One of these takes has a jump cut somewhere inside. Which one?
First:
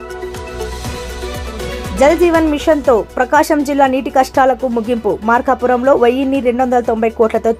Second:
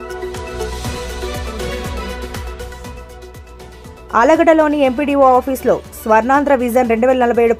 first; 1 cut; at 1.8 s

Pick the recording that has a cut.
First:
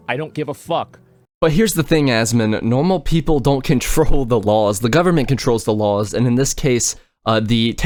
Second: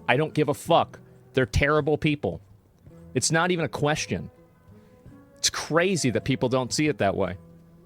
second; 1 cut; at 1.2 s

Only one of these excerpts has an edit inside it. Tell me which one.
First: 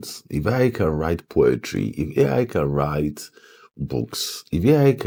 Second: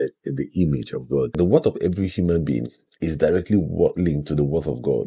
second; 1 cut; at 1.4 s

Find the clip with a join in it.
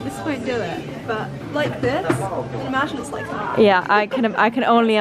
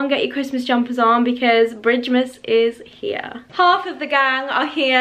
second; 1 cut; at 3.4 s

